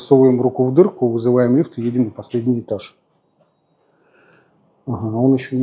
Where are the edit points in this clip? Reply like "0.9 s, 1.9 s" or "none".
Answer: none